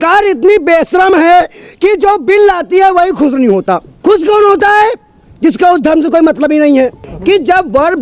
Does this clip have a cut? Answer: yes; 2 cuts; at 3.9 s, 7.1 s

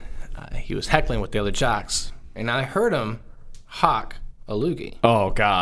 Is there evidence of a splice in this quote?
yes; 1 cut; at 2.4 s

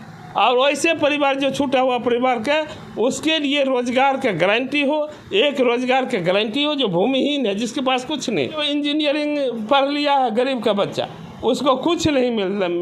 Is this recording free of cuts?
yes; 0 cuts

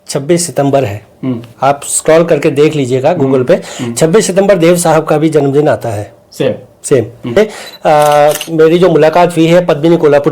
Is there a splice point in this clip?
yes; 1 cut; at 7.3 s

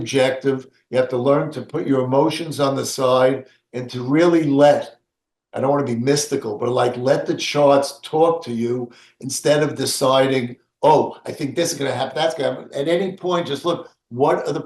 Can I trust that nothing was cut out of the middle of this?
yes; 0 cuts

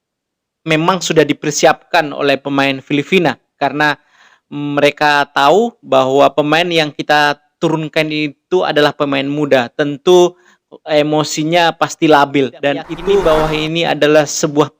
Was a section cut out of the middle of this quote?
yes; 1 cut; at 13.1 s

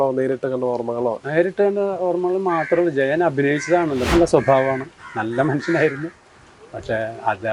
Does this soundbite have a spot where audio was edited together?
yes; 1 cut; at 4.0 s

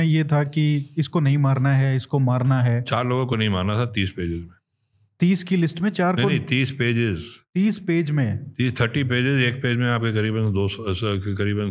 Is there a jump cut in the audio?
no; 0 cuts

